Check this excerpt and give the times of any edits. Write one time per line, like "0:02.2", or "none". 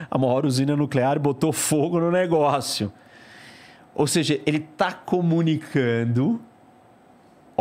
none